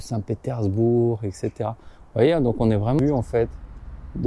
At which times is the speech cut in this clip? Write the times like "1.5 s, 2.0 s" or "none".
3.0 s